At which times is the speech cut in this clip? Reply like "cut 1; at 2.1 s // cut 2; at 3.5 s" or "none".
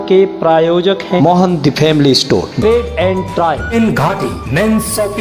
cut 1; at 1.2 s // cut 2; at 3.7 s